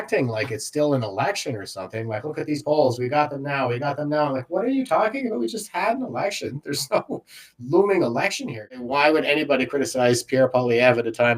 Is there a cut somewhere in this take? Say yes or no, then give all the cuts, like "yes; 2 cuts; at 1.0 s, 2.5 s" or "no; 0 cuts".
yes; 1 cut; at 8.8 s